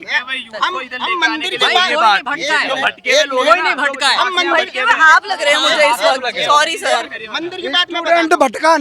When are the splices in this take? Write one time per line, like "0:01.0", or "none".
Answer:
none